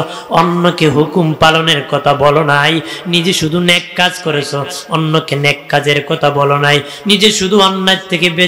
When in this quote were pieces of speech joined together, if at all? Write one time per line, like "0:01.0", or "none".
none